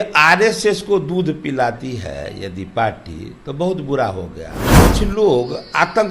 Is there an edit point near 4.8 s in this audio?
yes; 1 cut; at 4.8 s

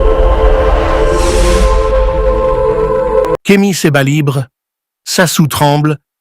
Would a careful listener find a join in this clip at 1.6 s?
no; 1 cut; at 3.4 s

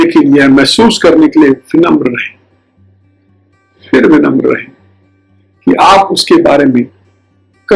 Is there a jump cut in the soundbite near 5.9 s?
no; 0 cuts

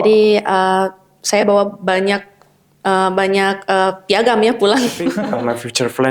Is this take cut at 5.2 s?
yes; 1 cut; at 5.2 s

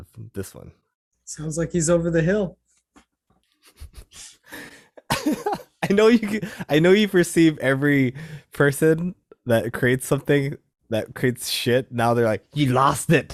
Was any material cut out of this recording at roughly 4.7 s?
no; 0 cuts

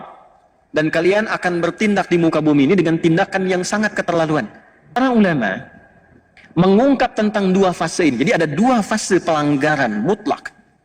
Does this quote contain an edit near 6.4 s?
no; 1 cut; at 4.9 s

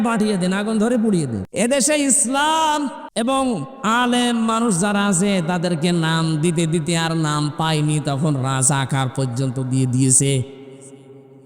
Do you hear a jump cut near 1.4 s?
yes; 2 cuts; at 1.4 s, 3.0 s

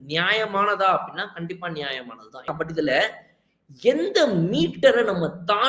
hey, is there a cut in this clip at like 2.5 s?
yes; 1 cut; at 2.5 s

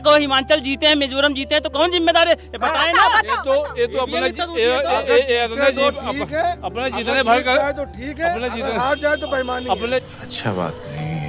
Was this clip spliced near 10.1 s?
no; 0 cuts

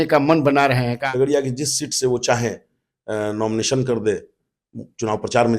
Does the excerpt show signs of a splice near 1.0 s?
yes; 1 cut; at 1.0 s

